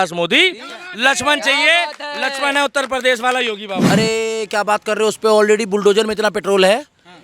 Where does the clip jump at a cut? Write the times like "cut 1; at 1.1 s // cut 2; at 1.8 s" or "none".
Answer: cut 1; at 3.9 s